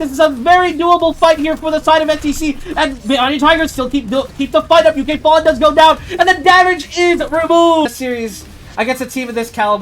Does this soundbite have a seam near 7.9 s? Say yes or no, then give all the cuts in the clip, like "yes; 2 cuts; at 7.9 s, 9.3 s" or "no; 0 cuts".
yes; 1 cut; at 7.9 s